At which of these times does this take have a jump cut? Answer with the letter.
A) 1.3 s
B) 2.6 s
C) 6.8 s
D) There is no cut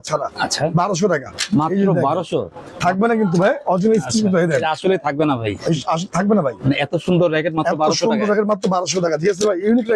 B